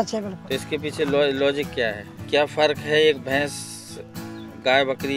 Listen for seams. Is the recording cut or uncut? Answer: cut